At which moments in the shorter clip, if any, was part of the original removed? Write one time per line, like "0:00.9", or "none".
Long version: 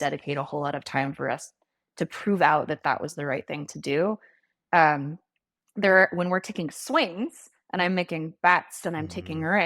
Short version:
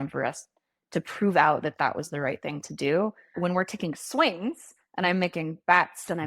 0:03.4